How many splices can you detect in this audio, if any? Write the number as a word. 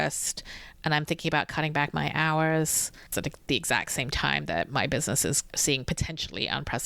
two